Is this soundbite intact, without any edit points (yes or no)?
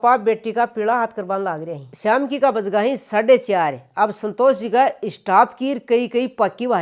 yes